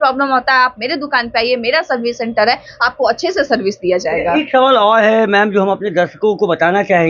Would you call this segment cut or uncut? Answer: uncut